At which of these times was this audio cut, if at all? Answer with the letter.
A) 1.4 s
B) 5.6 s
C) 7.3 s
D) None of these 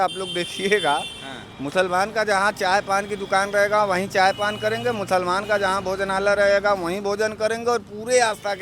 D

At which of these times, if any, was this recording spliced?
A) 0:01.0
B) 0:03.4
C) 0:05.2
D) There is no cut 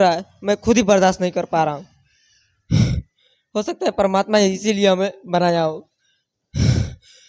D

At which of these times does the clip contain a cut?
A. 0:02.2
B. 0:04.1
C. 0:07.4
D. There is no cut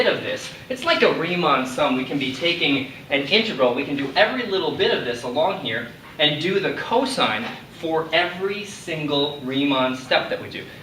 B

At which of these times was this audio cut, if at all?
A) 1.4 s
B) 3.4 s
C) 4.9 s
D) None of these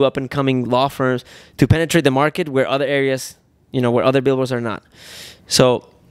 D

